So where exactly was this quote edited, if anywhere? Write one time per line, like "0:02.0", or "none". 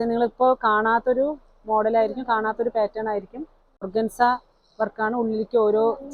0:03.9